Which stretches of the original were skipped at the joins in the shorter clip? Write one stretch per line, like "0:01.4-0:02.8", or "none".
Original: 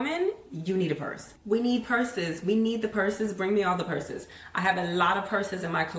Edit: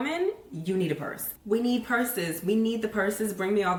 none